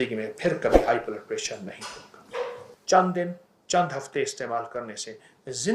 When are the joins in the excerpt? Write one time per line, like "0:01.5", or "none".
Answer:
0:02.7